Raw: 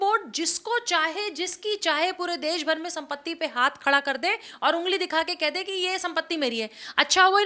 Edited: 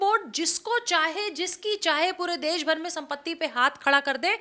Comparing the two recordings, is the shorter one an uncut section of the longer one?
yes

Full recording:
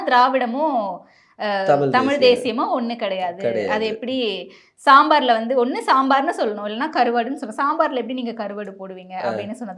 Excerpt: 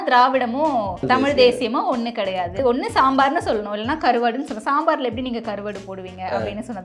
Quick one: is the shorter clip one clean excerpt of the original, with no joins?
no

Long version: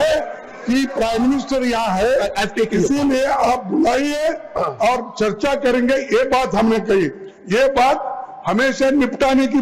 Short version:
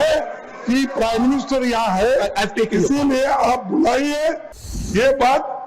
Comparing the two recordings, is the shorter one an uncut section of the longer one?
no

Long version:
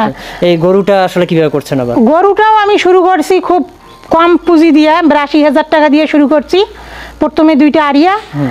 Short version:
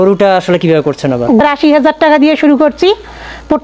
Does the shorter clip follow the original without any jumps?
no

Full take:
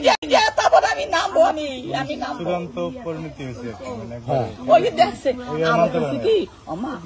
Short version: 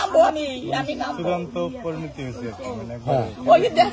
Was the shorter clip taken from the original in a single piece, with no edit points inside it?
yes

